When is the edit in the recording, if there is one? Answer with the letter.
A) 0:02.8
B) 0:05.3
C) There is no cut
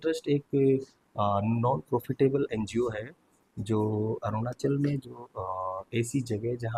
C